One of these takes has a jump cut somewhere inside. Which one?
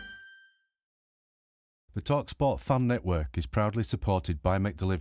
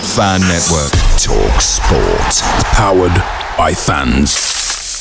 first; 1 cut; at 1.1 s

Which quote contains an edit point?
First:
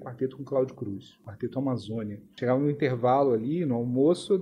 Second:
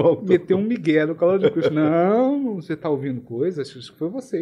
first; 2 cuts; at 1.2 s, 2.2 s

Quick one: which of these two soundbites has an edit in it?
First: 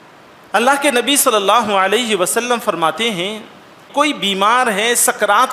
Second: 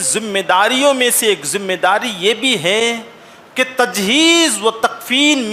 first; 1 cut; at 3.8 s

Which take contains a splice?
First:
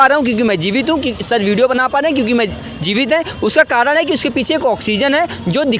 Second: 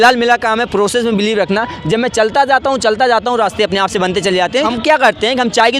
second; 1 cut; at 4.7 s

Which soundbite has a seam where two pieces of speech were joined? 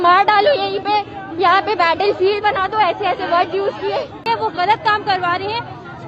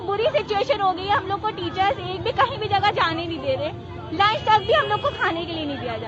first; 1 cut; at 4.3 s

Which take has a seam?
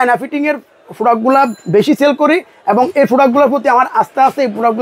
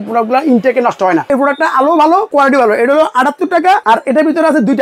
second; 3 cuts; at 1.2 s, 2.3 s, 3.8 s

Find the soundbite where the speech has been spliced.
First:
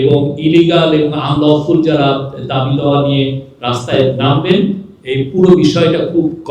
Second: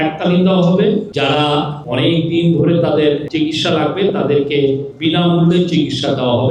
second; 3 cuts; at 1.6 s, 3.3 s, 4.9 s

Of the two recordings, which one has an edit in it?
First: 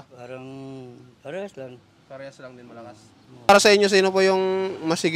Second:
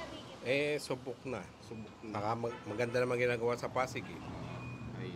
first; 1 cut; at 3.5 s

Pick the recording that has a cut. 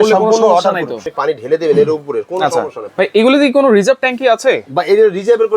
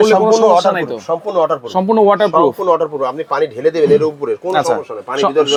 first; 2 cuts; at 1.0 s, 2.8 s

